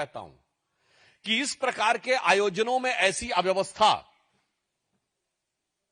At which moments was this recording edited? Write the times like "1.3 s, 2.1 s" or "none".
none